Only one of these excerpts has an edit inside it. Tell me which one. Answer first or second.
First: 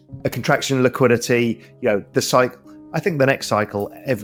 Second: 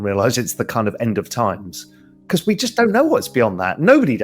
second